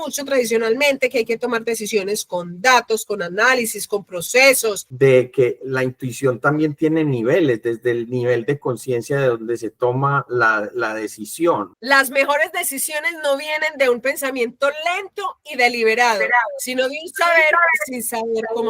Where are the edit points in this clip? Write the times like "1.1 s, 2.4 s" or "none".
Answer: 4.9 s, 11.7 s